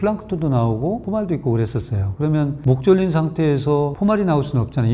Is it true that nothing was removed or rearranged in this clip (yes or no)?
yes